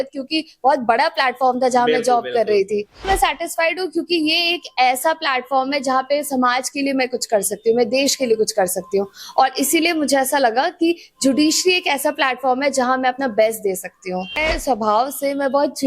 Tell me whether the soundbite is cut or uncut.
cut